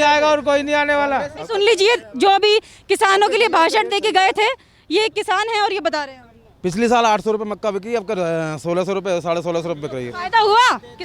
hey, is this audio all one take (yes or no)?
no